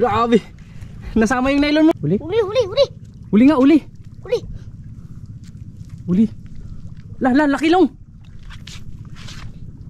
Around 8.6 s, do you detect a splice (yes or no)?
no